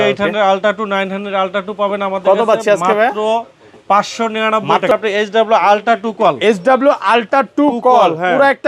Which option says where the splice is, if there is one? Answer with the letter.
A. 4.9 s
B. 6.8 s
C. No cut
A